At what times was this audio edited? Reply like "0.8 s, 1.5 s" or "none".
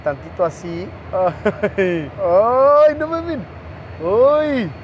1.0 s